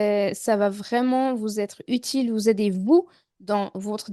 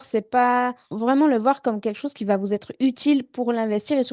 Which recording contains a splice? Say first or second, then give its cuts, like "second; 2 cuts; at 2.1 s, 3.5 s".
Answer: second; 1 cut; at 0.9 s